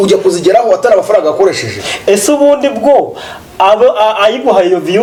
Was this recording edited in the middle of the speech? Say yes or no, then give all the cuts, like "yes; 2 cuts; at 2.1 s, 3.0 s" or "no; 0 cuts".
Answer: no; 0 cuts